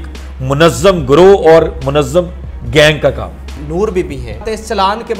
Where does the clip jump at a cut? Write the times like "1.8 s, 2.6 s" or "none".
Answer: 3.5 s, 4.4 s